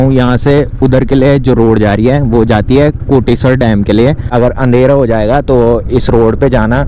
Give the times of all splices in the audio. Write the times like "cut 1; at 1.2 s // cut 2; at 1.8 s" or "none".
cut 1; at 4.3 s